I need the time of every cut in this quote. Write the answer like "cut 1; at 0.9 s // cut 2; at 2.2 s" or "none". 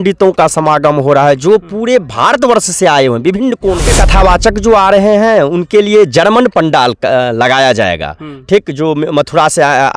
cut 1; at 3.9 s